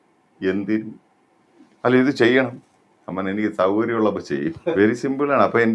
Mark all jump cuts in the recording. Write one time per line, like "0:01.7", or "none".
0:04.7